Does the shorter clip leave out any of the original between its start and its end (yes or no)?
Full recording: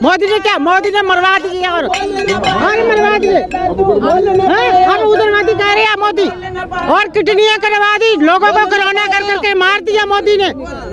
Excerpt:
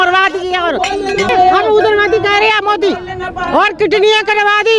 yes